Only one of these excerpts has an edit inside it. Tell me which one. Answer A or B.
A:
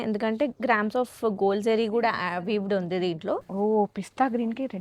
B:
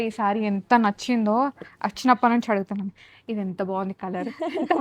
A